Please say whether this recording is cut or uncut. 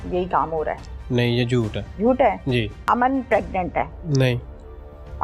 cut